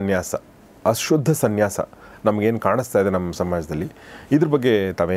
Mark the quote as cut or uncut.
uncut